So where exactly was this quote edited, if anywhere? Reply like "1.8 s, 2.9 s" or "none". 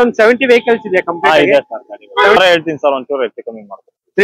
2.4 s